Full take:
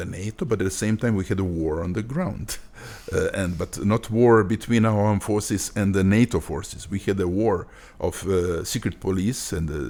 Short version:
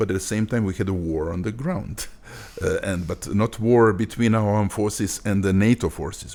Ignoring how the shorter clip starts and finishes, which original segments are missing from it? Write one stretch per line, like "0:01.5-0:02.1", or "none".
none